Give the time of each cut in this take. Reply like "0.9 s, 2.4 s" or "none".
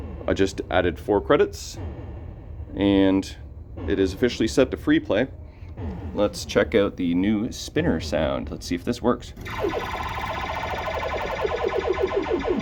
none

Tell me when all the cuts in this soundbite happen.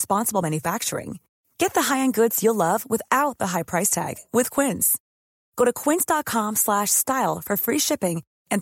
none

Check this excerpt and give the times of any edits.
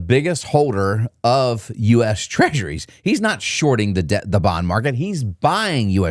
none

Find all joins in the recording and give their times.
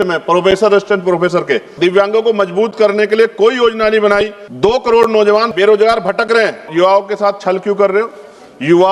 1.7 s, 4.4 s, 5.5 s, 6.7 s

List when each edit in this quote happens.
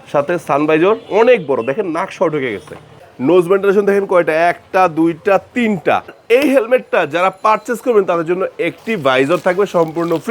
3.0 s, 6.2 s

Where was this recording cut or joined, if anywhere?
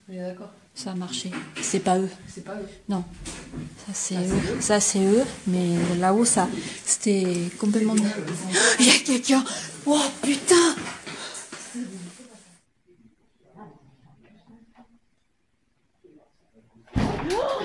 12.3 s

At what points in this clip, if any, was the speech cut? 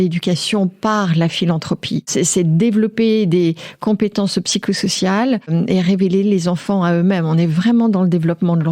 2.1 s, 5.5 s

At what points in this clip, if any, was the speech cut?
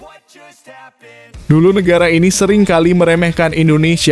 1.2 s

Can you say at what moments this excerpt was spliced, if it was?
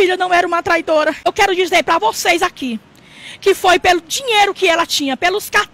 1.3 s

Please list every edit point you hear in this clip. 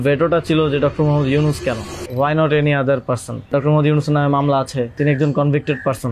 2.0 s, 3.5 s, 5.0 s

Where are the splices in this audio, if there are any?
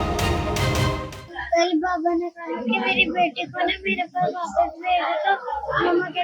1.2 s

